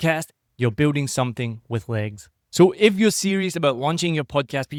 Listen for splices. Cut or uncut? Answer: uncut